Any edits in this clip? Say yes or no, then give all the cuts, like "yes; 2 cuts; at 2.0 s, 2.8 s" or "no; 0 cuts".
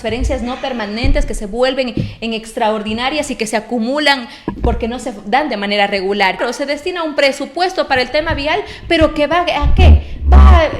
yes; 1 cut; at 6.4 s